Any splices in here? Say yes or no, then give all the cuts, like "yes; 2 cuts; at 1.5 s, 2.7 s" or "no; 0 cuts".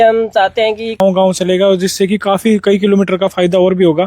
yes; 1 cut; at 1.0 s